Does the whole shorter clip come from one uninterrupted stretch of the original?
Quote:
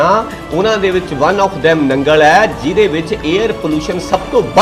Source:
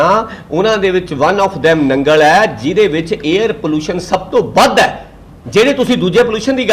yes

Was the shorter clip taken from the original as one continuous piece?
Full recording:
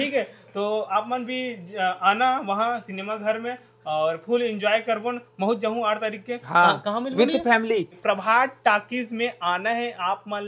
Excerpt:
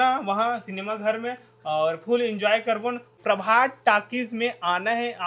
no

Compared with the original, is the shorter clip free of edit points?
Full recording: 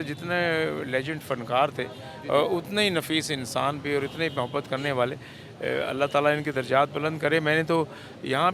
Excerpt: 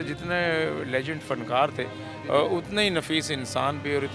yes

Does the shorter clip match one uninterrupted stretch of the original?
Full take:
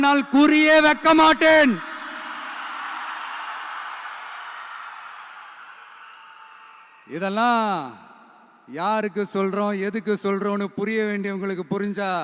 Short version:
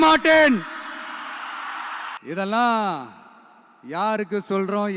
no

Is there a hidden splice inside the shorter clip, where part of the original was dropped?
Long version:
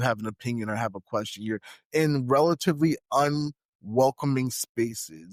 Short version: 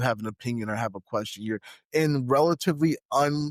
no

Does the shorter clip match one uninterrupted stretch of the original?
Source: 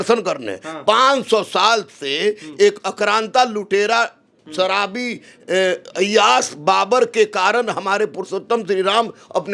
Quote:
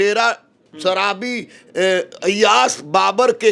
yes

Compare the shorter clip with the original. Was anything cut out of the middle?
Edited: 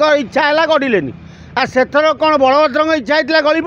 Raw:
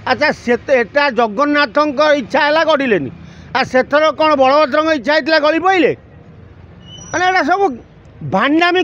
no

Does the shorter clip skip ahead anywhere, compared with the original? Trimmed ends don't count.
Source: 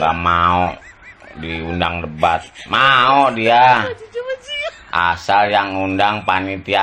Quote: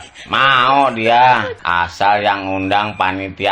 yes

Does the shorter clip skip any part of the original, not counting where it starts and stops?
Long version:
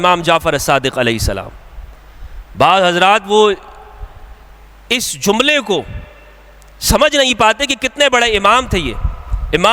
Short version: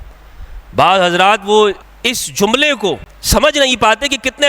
yes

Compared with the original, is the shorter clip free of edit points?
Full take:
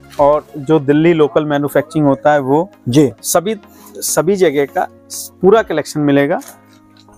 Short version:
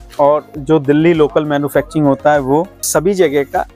no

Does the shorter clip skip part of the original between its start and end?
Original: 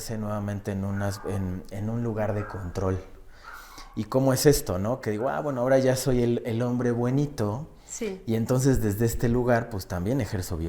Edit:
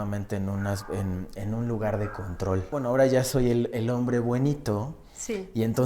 yes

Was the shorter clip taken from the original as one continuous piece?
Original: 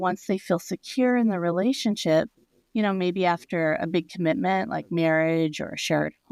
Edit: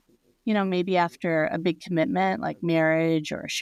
yes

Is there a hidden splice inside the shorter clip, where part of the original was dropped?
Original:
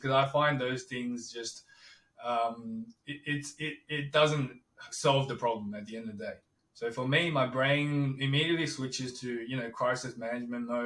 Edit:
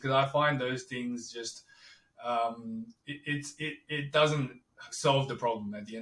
no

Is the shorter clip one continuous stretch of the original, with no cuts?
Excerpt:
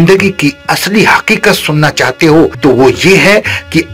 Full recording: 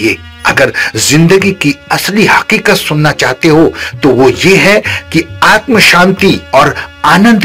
no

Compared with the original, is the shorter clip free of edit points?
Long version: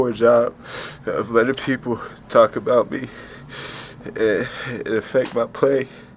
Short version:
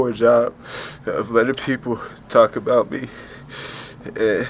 yes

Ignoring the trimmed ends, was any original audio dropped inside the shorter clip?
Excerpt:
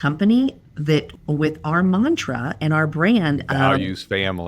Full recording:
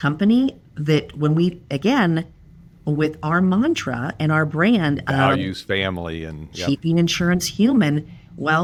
yes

